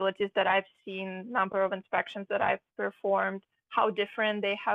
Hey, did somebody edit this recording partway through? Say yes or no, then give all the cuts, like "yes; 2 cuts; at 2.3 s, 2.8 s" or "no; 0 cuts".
no; 0 cuts